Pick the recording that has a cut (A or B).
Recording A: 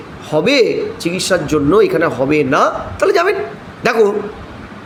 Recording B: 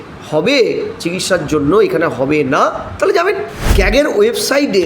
B